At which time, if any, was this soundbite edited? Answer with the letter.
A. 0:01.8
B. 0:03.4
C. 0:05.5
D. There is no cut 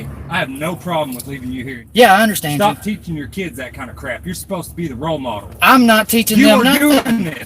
A